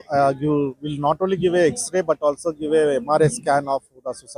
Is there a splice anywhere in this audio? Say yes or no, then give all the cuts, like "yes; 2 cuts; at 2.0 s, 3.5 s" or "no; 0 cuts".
no; 0 cuts